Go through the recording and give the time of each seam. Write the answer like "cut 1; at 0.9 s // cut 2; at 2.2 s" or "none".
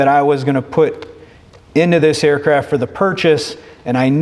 none